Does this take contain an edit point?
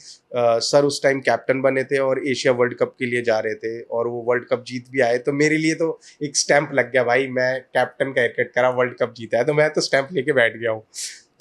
no; 0 cuts

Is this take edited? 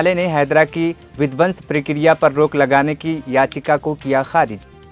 no; 0 cuts

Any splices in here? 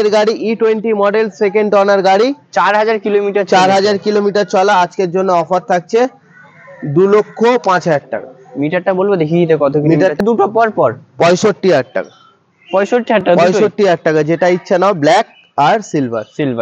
yes; 1 cut; at 10.2 s

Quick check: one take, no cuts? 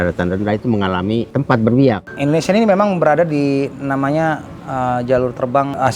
no; 1 cut; at 2.1 s

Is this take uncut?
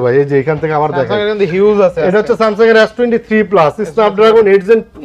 yes; 0 cuts

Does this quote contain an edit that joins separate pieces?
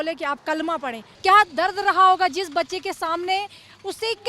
yes; 1 cut; at 1.1 s

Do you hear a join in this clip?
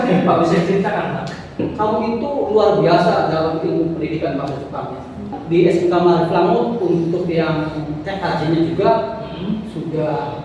yes; 2 cuts; at 1.7 s, 5.3 s

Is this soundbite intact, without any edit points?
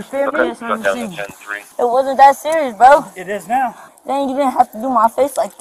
no; 2 cuts; at 1.6 s, 3.8 s

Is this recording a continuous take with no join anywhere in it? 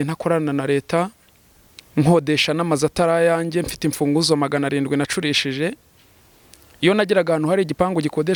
yes; 0 cuts

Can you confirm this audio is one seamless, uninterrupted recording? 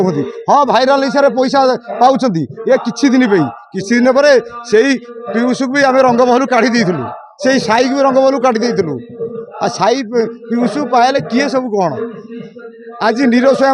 yes; 0 cuts

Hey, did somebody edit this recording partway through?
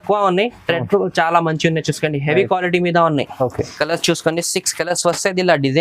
yes; 1 cut; at 3.7 s

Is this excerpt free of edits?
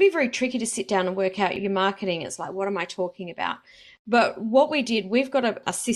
no; 1 cut; at 1.6 s

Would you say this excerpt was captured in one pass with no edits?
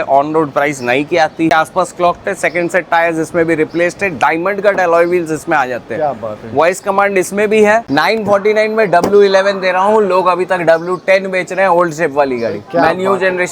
no; 2 cuts; at 1.5 s, 7.9 s

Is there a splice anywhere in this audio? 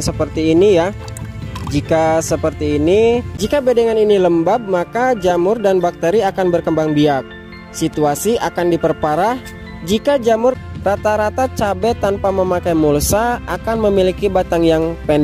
yes; 2 cuts; at 3.3 s, 10.6 s

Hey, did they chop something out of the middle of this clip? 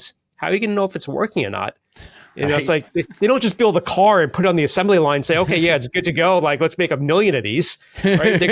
no; 0 cuts

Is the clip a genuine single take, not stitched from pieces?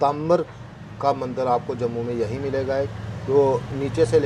yes; 0 cuts

